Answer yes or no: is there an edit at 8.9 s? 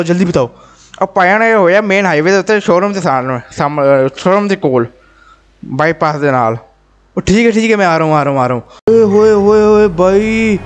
yes